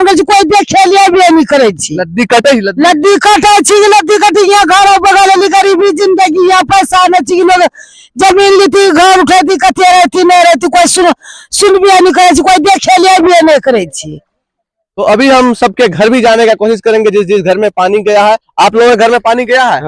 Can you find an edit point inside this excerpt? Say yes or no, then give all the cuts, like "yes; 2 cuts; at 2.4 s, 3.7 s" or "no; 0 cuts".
no; 0 cuts